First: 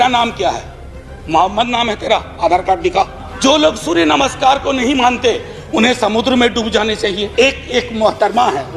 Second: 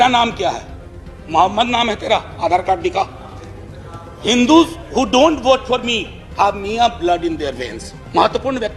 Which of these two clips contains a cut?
first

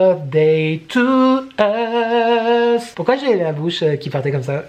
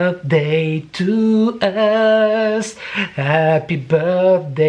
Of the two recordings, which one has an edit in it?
first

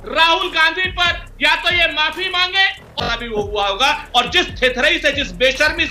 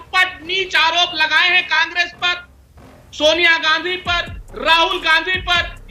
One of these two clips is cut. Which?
first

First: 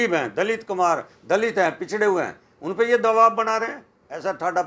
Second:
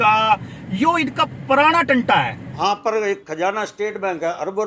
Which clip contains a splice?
second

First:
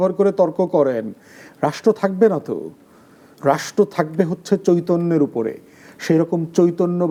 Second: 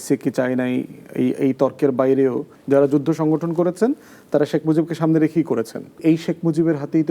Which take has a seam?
second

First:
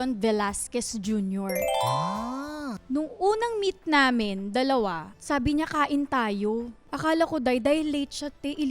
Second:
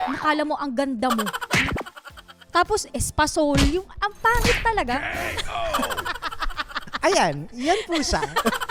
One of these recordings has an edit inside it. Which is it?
first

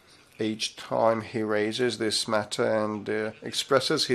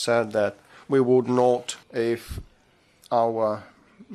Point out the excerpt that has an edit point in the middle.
second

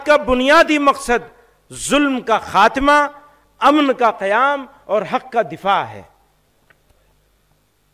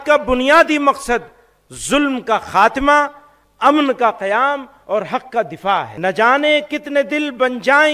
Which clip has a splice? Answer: second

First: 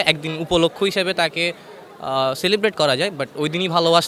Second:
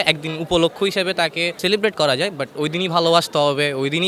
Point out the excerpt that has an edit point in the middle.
second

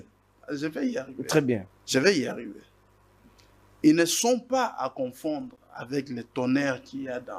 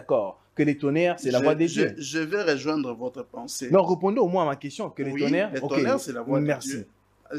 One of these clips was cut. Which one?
first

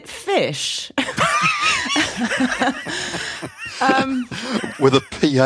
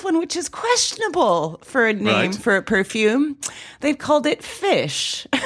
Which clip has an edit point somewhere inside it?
first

